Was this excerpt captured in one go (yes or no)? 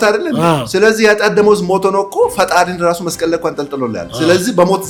yes